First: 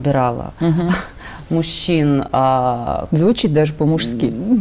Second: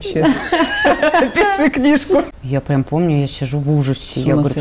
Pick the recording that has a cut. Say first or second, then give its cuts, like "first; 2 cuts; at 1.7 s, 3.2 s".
second; 1 cut; at 2.3 s